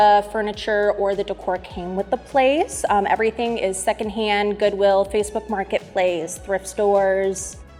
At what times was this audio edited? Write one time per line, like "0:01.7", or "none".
none